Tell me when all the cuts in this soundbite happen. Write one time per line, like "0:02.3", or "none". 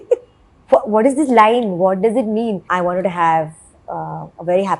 0:02.6

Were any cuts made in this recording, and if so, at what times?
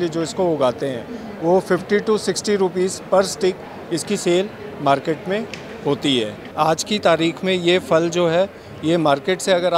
0:06.4

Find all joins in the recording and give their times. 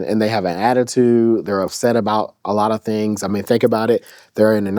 none

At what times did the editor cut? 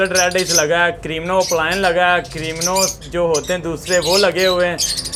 none

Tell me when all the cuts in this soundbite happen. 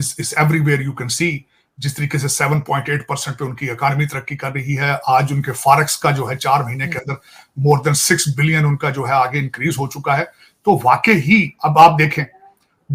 none

